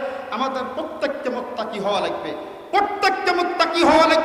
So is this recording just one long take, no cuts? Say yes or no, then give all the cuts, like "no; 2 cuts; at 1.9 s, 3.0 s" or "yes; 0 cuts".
yes; 0 cuts